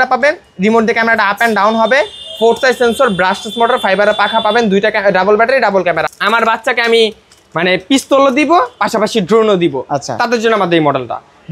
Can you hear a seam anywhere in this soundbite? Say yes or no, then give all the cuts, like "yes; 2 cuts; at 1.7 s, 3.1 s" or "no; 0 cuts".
yes; 1 cut; at 6.1 s